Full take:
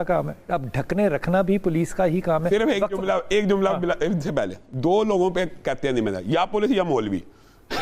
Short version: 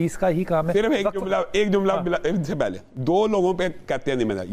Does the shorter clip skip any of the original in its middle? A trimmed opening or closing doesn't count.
no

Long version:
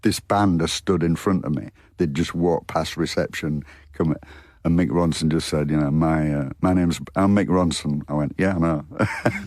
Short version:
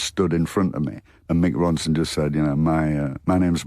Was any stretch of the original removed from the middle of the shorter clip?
yes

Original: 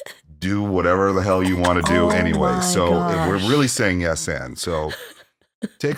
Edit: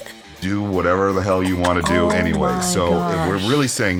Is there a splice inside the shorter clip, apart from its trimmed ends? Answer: no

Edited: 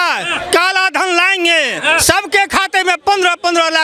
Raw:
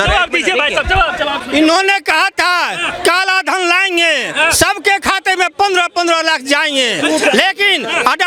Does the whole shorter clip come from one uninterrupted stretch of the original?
yes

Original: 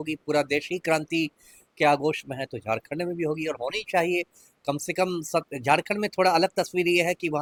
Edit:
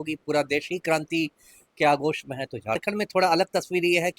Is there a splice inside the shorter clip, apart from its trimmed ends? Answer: yes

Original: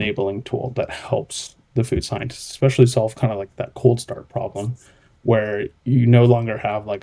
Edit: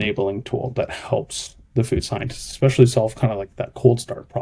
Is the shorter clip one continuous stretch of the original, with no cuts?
yes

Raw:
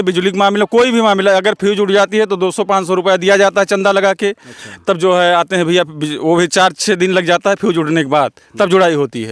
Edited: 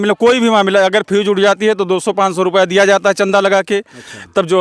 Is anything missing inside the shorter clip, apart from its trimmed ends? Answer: no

